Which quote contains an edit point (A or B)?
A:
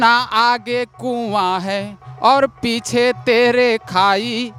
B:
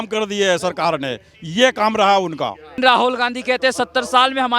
B